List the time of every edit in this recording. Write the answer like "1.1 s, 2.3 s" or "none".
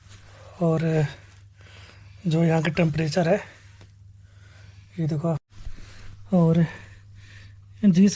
5.4 s

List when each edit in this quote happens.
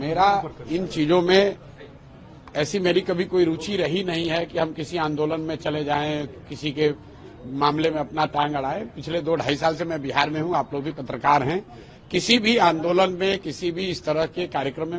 none

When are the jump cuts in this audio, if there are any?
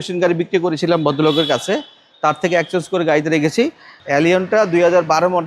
3.9 s

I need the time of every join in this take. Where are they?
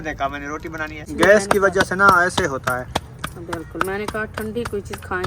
1.1 s

